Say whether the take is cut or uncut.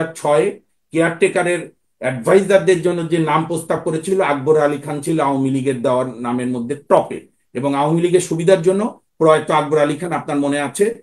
uncut